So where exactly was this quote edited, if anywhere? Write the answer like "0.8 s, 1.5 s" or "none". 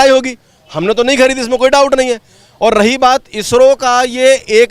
none